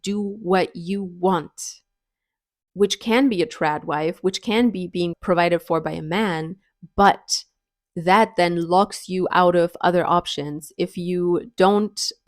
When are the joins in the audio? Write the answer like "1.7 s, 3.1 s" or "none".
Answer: 5.2 s